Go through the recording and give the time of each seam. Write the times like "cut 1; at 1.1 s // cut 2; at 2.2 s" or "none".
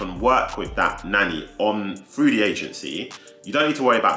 none